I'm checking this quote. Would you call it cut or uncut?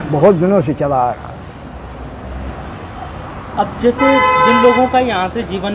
uncut